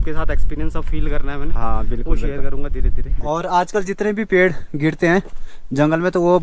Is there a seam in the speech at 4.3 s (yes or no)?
no